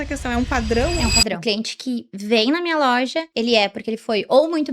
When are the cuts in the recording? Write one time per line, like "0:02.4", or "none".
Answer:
0:01.4
0:03.2

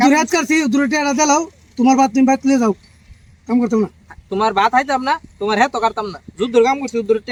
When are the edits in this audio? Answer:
none

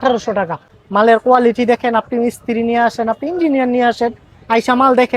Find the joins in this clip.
0:01.0

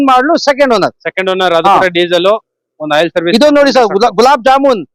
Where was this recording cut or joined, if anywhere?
none

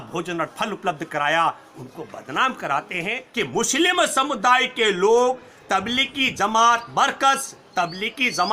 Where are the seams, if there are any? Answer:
0:03.2

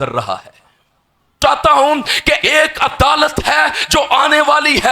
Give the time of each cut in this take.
0:01.4

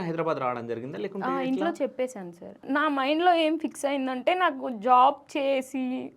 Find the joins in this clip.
0:02.6

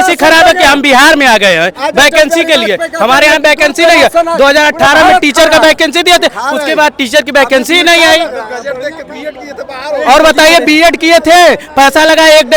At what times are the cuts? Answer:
none

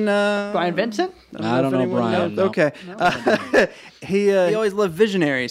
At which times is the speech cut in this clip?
0:04.5

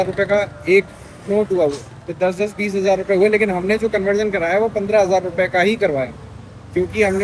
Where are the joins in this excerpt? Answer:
none

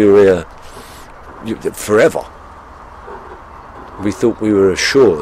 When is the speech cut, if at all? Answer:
none

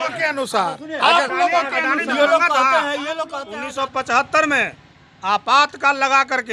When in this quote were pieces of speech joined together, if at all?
0:03.4

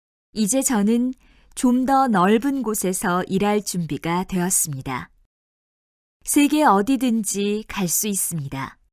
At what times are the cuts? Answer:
none

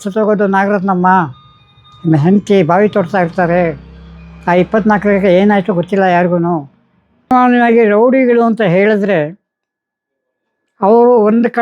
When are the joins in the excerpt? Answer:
0:07.3

